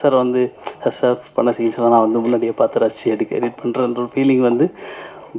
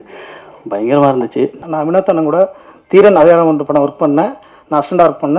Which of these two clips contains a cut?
second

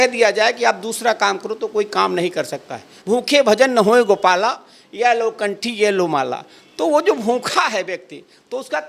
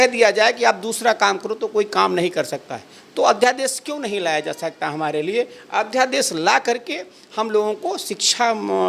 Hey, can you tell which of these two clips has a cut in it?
first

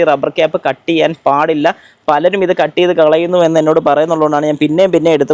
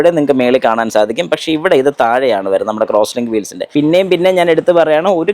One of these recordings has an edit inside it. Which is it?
second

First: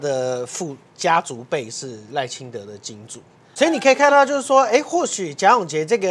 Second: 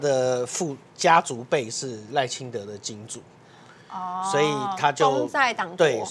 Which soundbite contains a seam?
first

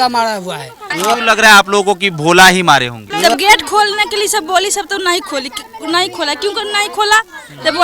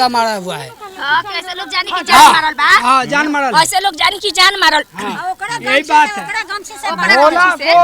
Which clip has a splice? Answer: first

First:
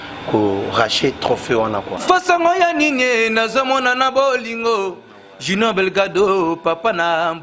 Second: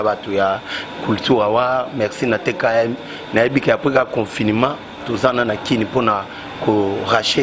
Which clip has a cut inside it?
first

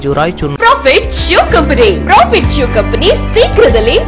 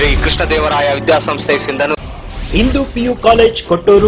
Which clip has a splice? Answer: second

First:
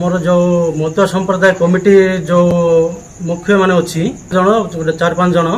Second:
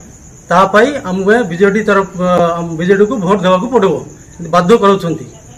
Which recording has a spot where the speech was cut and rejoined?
first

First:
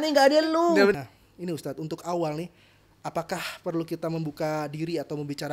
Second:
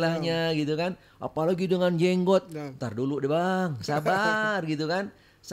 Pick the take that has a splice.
first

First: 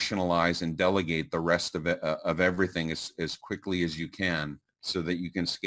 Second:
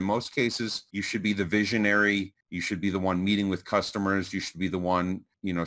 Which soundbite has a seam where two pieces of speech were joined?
first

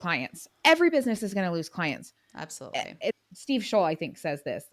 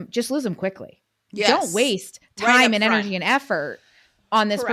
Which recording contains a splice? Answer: second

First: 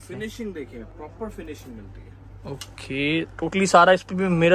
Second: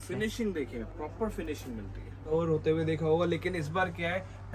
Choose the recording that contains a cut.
second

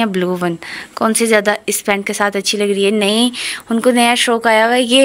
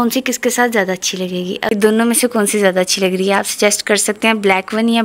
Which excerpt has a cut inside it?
second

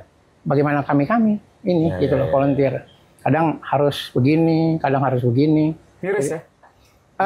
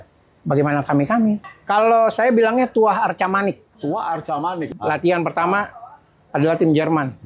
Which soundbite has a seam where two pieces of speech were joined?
second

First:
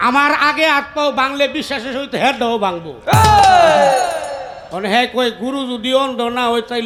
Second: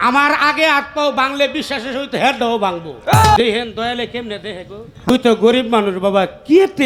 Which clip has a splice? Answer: second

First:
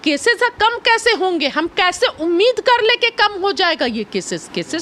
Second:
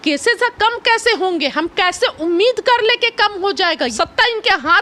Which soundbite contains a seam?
second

